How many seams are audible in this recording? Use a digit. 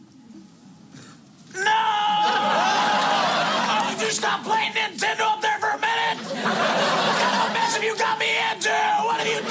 1